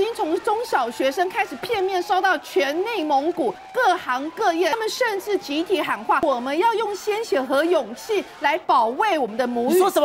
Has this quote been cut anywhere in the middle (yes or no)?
yes